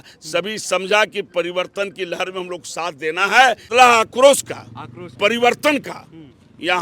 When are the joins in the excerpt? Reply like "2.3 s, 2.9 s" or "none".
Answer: 3.7 s